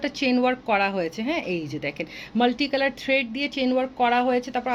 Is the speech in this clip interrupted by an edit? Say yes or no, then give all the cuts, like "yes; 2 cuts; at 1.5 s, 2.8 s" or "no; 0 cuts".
no; 0 cuts